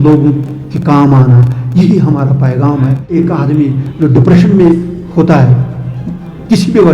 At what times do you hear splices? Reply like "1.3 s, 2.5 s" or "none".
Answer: 3.1 s